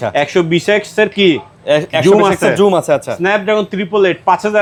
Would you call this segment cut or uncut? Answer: uncut